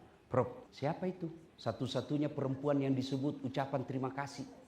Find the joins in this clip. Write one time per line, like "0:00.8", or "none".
0:01.1

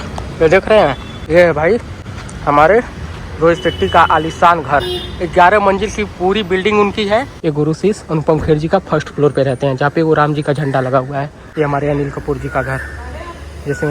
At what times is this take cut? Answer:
0:01.1
0:07.3
0:11.4

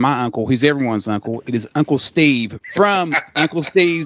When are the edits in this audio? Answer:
0:02.6

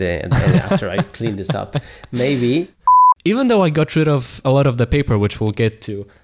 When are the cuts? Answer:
0:02.9

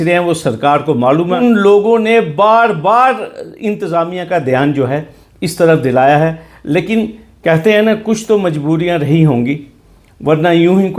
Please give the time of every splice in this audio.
0:01.4

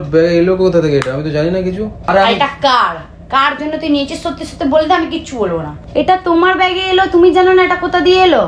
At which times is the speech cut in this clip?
0:02.0
0:05.8

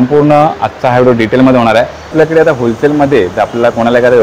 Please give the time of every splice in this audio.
0:02.1

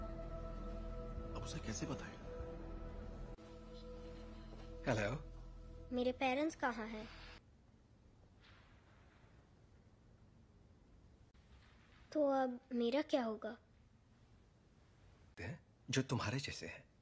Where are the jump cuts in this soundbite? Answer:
0:07.4

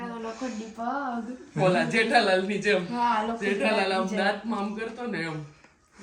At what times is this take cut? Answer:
none

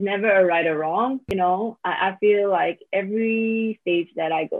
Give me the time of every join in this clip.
0:01.6

